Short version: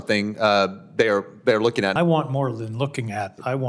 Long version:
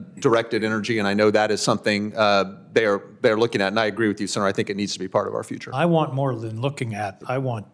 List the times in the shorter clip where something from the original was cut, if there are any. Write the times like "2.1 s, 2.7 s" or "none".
1.9 s